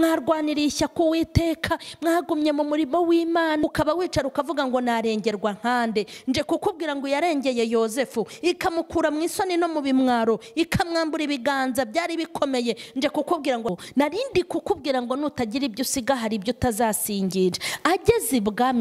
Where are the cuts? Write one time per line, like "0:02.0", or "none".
0:03.7
0:13.7